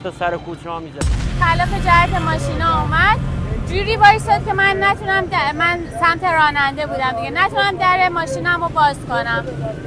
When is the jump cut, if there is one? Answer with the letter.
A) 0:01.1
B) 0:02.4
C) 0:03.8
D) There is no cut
A